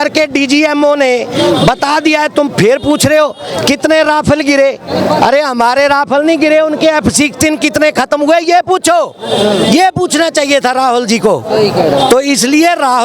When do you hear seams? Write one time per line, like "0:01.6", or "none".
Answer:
none